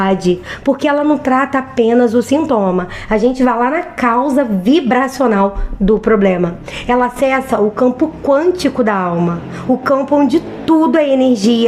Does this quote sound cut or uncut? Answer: uncut